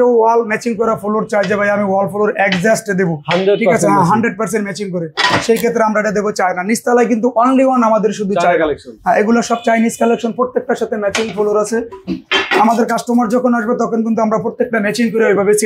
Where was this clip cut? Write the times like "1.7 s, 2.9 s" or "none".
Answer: none

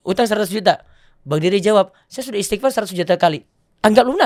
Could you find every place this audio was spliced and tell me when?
none

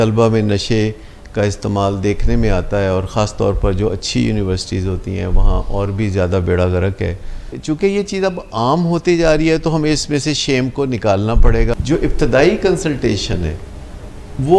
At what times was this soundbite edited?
7.5 s, 11.8 s

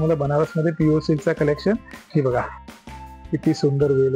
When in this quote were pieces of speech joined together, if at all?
2.8 s

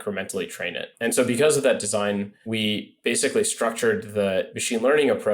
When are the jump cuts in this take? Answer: 0.9 s, 2.4 s, 4.5 s

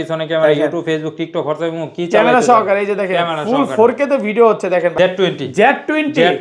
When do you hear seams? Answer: 4.9 s

